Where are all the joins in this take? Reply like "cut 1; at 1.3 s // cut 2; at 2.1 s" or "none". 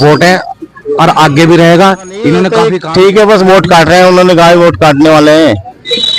cut 1; at 2.7 s

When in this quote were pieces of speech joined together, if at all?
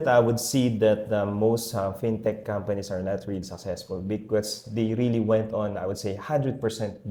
none

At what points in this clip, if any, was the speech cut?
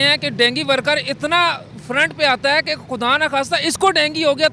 none

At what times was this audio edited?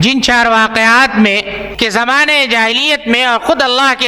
cut 1; at 1.6 s

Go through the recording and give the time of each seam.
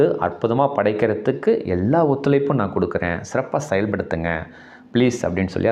none

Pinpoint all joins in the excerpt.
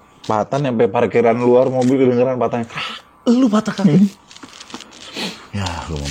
none

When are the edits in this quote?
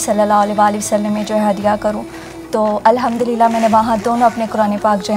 none

